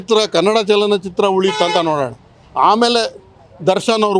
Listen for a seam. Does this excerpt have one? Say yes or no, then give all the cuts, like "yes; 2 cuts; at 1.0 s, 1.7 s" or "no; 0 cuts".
no; 0 cuts